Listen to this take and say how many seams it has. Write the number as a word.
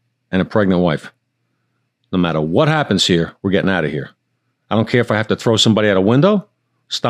zero